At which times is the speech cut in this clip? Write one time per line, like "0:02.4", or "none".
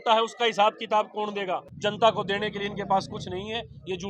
0:01.7